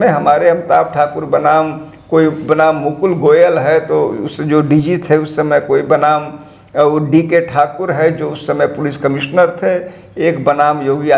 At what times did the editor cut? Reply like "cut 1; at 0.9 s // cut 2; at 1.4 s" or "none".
none